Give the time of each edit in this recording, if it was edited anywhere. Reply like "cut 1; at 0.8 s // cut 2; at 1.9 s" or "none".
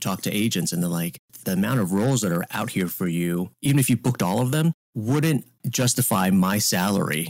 cut 1; at 1.3 s // cut 2; at 2.5 s // cut 3; at 3.5 s // cut 4; at 4.9 s // cut 5; at 5.6 s